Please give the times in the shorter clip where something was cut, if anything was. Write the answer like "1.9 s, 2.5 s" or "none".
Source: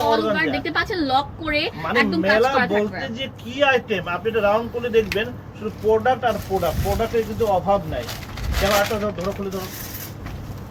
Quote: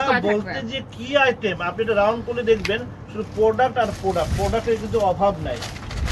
none